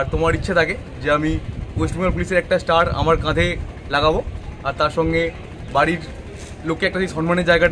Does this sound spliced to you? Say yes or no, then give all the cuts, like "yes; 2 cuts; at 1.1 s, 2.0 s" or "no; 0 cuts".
no; 0 cuts